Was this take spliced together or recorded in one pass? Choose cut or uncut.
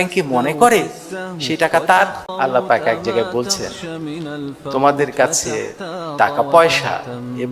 cut